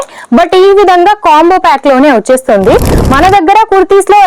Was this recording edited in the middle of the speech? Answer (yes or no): yes